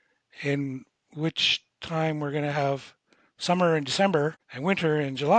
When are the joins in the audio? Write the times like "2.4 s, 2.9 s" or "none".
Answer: 4.5 s